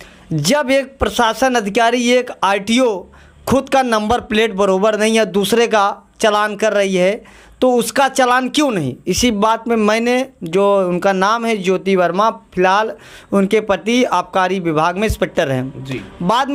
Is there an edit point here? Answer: no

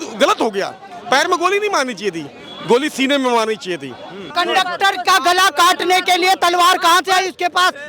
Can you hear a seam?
yes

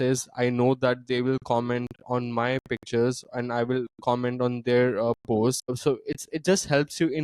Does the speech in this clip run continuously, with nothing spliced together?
no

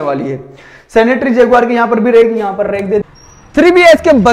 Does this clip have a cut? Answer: yes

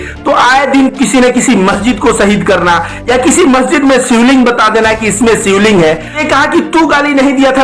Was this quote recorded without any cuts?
no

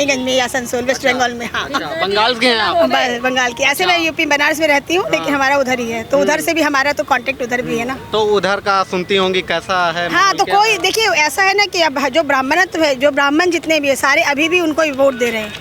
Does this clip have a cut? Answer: no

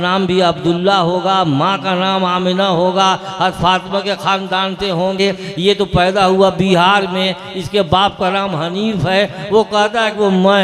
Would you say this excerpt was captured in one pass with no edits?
no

